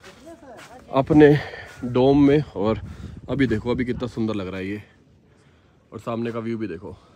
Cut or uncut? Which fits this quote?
uncut